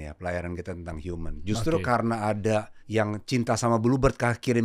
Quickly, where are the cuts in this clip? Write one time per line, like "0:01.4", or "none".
0:02.8

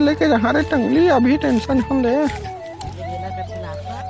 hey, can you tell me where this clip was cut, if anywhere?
0:02.8

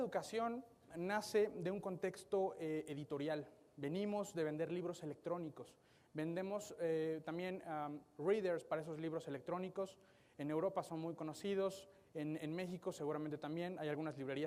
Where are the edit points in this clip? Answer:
0:06.6

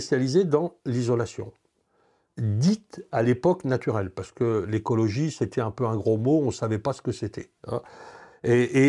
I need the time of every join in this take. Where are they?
none

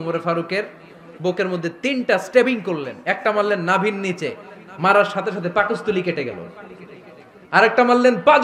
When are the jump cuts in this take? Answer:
none

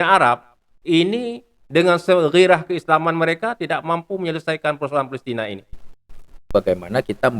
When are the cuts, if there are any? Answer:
0:06.5

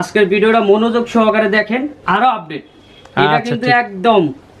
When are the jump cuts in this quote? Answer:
0:02.0

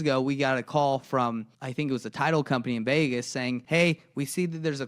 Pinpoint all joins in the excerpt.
0:01.6
0:03.6

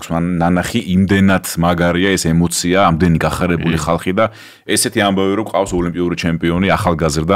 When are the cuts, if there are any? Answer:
none

